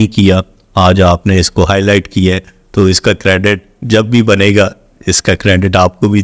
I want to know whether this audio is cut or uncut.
uncut